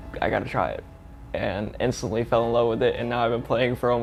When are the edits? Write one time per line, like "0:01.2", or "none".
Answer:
none